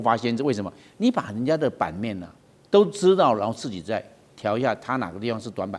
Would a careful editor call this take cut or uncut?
uncut